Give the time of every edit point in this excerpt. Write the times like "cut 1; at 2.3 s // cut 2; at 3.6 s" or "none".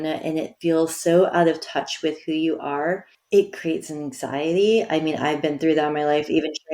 cut 1; at 3.1 s